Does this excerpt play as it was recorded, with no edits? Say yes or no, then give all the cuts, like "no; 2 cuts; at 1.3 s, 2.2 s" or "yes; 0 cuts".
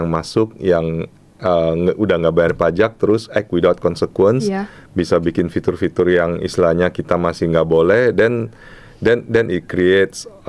yes; 0 cuts